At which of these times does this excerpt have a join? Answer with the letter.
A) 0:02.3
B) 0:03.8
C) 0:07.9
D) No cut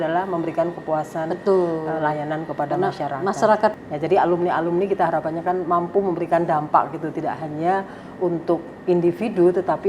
B